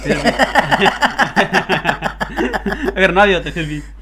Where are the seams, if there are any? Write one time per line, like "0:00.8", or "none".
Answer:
none